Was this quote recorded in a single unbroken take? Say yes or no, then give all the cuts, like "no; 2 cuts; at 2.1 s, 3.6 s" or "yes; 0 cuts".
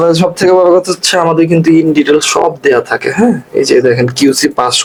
yes; 0 cuts